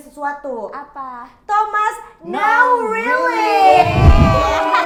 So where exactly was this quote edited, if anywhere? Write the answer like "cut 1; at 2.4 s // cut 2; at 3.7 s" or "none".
none